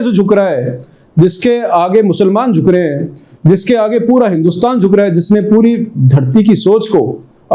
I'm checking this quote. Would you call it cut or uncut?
uncut